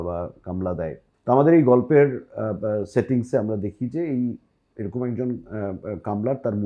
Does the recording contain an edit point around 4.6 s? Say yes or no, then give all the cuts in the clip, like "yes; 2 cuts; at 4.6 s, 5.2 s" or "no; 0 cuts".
no; 1 cut; at 1.1 s